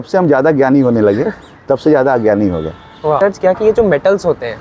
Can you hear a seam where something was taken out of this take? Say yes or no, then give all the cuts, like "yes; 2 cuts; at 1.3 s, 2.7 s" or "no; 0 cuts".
yes; 1 cut; at 3.2 s